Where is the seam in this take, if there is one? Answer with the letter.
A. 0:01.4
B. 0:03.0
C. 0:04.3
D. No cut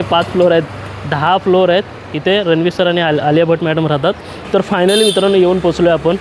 C